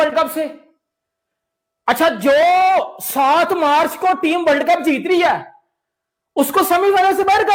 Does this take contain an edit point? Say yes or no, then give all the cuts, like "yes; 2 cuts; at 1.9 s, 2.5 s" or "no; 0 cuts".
no; 0 cuts